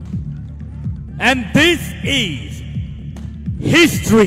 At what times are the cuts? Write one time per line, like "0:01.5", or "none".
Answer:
0:01.1